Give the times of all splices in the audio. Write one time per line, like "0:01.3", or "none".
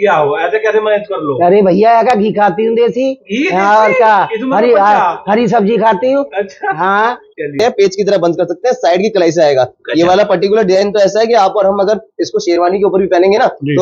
0:07.6